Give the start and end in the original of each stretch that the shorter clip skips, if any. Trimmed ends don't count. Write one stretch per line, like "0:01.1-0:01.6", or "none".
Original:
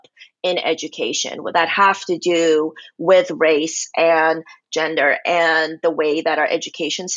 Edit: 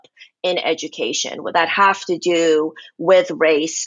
none